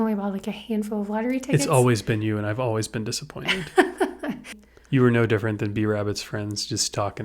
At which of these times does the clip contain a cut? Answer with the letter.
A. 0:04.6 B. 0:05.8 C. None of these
A